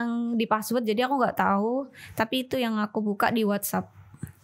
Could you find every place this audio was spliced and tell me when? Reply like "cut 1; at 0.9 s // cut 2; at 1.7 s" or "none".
none